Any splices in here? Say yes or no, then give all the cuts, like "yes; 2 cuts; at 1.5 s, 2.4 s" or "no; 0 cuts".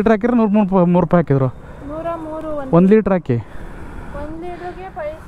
no; 0 cuts